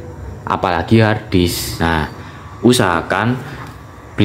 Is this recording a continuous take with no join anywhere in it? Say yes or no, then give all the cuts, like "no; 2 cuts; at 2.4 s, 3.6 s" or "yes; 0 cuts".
no; 1 cut; at 2.0 s